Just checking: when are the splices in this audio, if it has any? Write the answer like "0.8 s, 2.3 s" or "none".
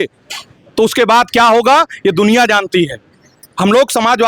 none